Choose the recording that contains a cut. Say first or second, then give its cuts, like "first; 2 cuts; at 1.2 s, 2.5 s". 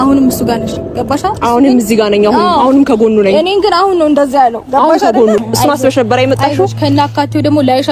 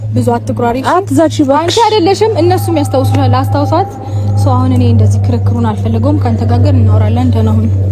first; 1 cut; at 5.4 s